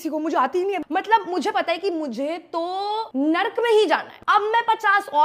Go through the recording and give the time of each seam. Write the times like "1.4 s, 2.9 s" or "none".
0.8 s, 3.1 s, 4.1 s